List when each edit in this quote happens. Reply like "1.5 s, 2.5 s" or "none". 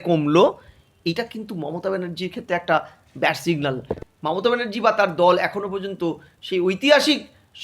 3.9 s